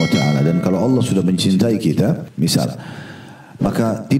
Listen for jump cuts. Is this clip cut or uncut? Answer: cut